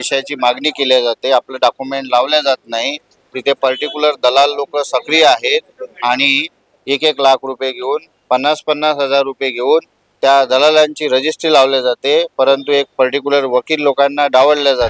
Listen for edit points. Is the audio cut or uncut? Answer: uncut